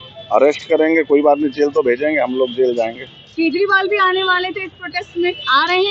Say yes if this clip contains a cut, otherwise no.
no